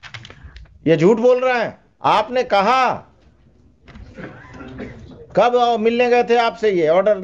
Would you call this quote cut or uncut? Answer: cut